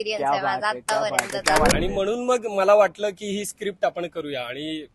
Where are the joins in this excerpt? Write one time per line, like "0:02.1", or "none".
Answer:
0:01.7